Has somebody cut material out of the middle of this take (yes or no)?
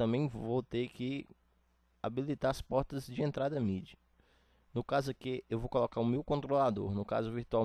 no